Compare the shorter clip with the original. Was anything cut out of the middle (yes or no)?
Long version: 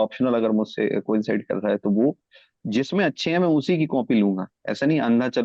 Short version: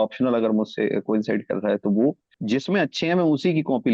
yes